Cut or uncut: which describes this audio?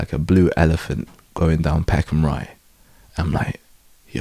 uncut